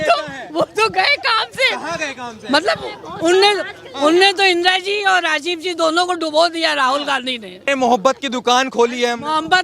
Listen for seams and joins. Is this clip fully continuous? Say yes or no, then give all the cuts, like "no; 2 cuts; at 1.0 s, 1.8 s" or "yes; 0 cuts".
no; 1 cut; at 7.7 s